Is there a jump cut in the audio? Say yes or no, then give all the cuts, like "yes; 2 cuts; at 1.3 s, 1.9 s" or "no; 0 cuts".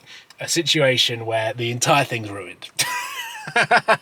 no; 0 cuts